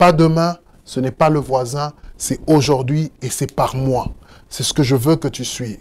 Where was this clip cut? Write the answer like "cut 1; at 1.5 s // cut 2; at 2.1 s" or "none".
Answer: none